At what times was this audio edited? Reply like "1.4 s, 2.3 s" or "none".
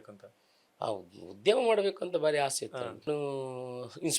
3.1 s

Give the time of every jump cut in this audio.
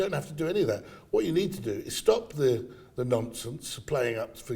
none

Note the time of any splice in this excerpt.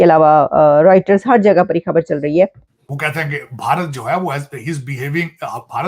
2.7 s

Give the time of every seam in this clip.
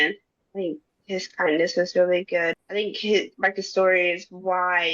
2.6 s

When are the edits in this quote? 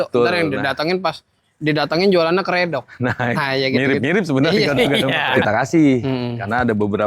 5.4 s

